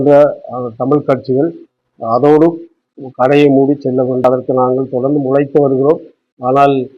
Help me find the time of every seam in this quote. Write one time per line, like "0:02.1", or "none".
0:04.2